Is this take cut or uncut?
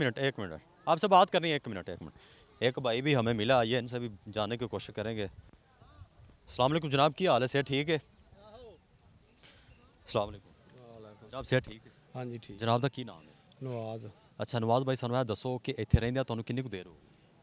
uncut